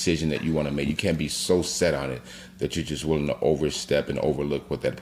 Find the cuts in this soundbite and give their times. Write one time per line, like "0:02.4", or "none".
none